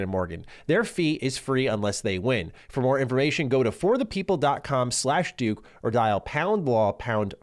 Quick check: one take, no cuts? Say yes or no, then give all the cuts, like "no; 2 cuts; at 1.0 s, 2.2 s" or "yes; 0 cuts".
yes; 0 cuts